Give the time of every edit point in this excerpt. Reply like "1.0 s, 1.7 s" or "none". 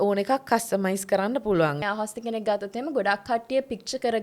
1.8 s